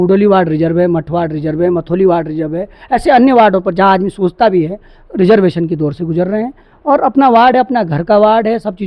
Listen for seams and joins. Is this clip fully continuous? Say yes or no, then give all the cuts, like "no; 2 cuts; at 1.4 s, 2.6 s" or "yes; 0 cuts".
yes; 0 cuts